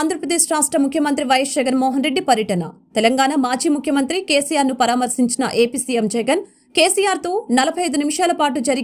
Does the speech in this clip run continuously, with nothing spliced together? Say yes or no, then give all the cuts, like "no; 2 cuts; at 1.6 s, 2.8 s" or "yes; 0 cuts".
yes; 0 cuts